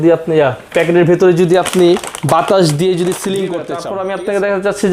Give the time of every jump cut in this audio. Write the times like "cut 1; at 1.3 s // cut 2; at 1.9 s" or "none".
cut 1; at 3.6 s